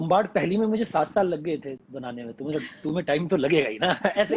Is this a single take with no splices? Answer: yes; 0 cuts

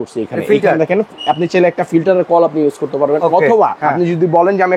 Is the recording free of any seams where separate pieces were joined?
no; 1 cut; at 3.8 s

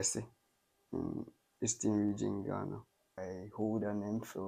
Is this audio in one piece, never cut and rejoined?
no; 1 cut; at 3.1 s

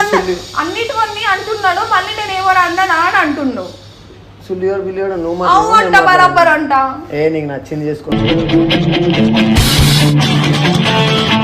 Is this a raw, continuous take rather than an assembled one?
yes; 0 cuts

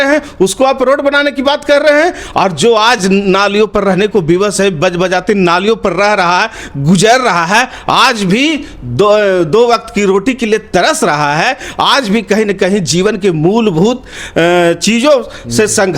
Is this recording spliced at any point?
no; 0 cuts

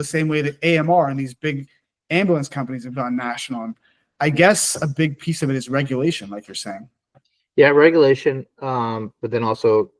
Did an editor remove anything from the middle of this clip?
no; 0 cuts

